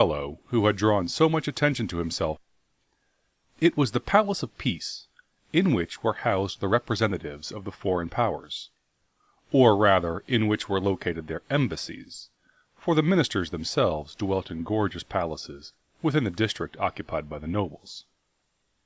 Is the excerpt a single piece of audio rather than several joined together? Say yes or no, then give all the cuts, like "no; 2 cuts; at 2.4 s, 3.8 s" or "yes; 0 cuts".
yes; 0 cuts